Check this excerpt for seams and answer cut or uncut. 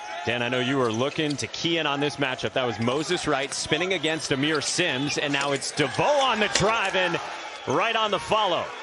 uncut